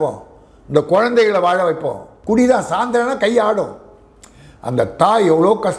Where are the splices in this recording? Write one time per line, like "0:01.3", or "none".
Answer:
0:02.1